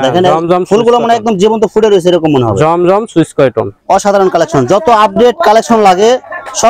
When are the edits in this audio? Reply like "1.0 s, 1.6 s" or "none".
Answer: 3.8 s